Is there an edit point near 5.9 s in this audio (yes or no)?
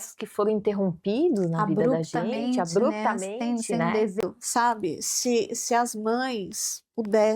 no